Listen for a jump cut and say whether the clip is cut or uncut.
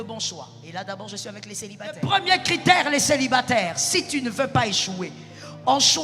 cut